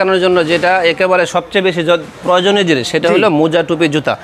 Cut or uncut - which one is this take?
uncut